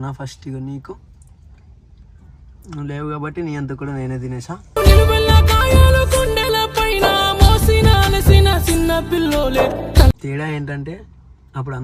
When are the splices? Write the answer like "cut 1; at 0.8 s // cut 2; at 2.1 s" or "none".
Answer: cut 1; at 10.2 s